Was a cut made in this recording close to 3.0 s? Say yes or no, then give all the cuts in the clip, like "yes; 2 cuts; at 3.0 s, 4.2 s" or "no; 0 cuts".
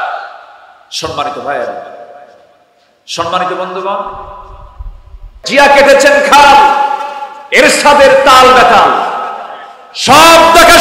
no; 1 cut; at 5.4 s